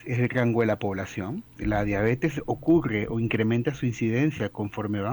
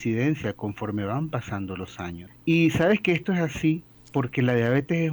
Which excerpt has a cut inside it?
second; 2 cuts; at 2.3 s, 3.9 s

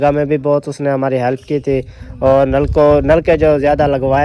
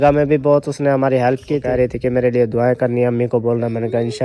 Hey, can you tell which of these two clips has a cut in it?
second; 1 cut; at 1.6 s

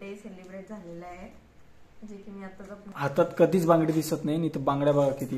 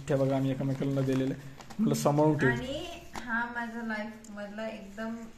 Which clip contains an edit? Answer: first; 1 cut; at 2.9 s

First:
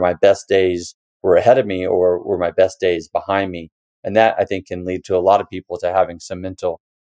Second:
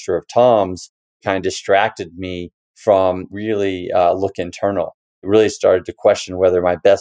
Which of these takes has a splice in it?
second; 3 cuts; at 1.2 s, 3.3 s, 5.2 s

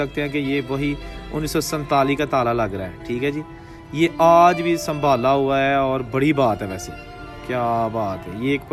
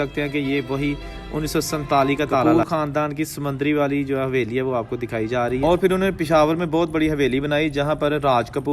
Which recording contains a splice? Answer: second; 2 cuts; at 2.4 s, 5.6 s

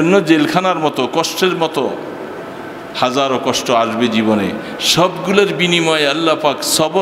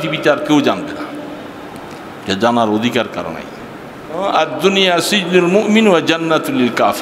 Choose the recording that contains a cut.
second; 1 cut; at 4.2 s

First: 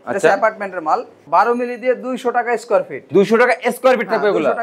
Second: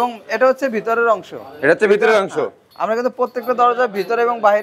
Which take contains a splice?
first; 1 cut; at 1.2 s

